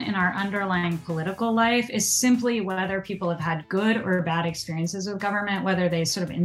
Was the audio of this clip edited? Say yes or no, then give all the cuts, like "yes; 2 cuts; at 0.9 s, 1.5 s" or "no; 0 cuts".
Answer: no; 0 cuts